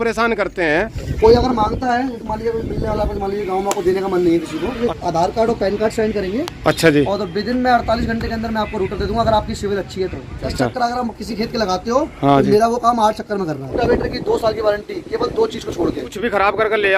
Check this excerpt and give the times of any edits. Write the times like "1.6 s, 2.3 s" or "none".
1.0 s, 4.8 s, 10.5 s, 13.7 s, 16.1 s